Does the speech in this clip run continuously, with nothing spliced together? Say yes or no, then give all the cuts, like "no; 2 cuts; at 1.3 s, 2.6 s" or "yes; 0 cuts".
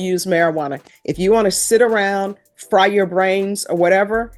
yes; 0 cuts